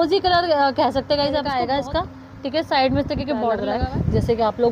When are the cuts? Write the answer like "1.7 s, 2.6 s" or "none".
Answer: 1.5 s, 3.7 s